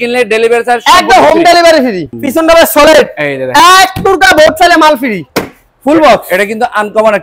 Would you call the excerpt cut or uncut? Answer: cut